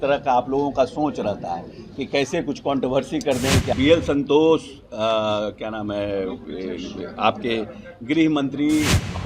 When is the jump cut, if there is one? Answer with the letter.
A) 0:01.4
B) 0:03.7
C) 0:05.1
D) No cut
B